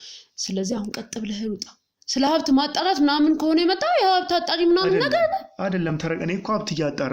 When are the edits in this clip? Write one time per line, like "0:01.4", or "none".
none